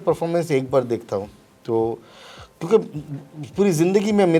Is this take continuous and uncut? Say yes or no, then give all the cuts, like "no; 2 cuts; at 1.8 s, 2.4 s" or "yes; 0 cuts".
yes; 0 cuts